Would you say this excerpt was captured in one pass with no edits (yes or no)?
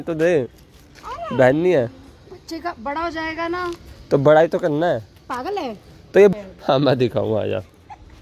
no